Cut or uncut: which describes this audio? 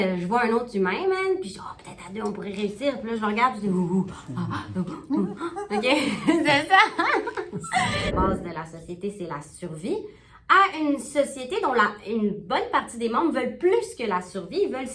cut